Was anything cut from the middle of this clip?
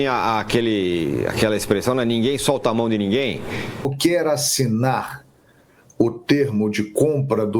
yes; 1 cut; at 3.9 s

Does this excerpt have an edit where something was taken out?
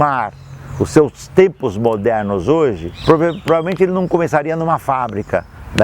yes; 1 cut; at 2.9 s

